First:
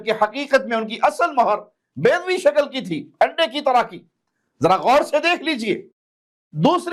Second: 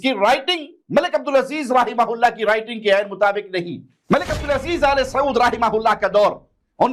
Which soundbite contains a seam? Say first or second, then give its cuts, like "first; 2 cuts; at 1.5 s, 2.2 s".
second; 1 cut; at 4.0 s